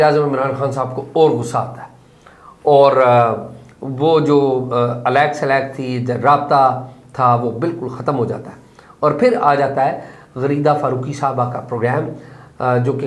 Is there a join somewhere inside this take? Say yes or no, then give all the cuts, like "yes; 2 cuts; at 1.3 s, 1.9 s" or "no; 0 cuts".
no; 0 cuts